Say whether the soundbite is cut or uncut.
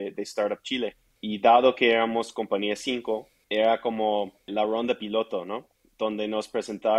cut